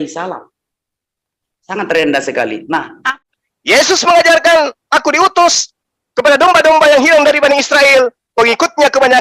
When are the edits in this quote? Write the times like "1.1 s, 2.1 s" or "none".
3.1 s